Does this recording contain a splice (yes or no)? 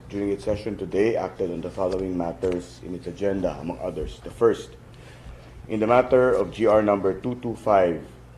yes